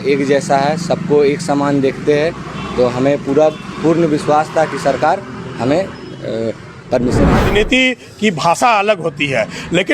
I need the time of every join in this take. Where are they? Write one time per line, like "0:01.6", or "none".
0:07.4